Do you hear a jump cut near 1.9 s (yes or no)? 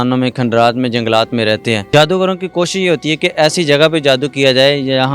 yes